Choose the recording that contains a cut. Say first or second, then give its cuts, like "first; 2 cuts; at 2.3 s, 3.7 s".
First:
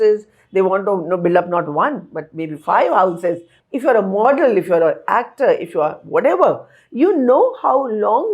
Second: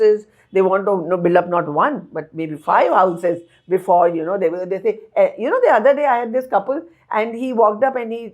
first; 1 cut; at 3.5 s